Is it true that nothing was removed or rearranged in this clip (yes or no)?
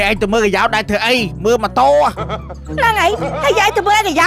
yes